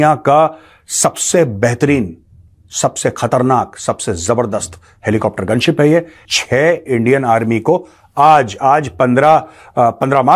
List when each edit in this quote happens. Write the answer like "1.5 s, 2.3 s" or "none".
6.2 s